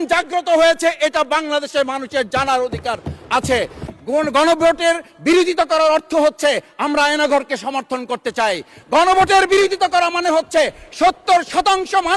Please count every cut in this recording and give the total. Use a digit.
1